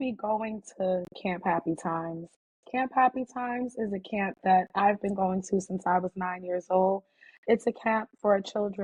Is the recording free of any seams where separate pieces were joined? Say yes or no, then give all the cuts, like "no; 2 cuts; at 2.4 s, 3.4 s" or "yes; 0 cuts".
yes; 0 cuts